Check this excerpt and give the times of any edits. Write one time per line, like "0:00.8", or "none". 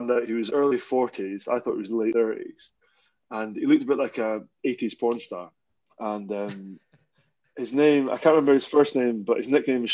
0:02.1